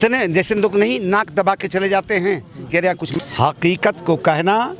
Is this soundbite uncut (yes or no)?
no